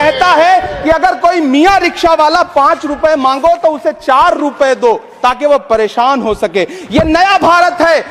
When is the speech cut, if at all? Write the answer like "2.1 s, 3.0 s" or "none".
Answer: none